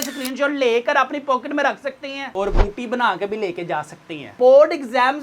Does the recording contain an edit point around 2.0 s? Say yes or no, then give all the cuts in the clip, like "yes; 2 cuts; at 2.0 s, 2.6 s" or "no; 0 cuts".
no; 1 cut; at 4.3 s